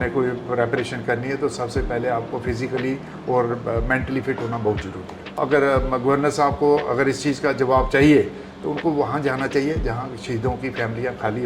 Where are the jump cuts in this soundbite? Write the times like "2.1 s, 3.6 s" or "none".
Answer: 5.3 s